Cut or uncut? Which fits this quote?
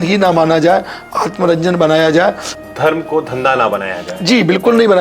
cut